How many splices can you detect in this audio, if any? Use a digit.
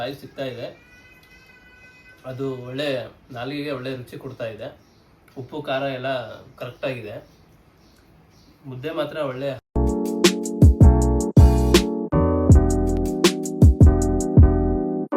1